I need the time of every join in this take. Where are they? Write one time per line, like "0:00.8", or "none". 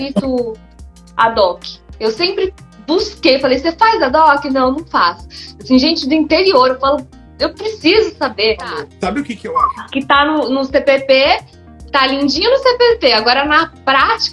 0:09.2